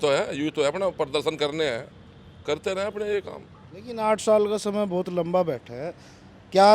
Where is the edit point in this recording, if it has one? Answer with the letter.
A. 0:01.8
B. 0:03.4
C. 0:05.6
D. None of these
D